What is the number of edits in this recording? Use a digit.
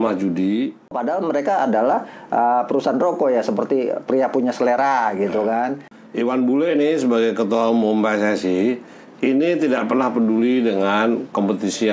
2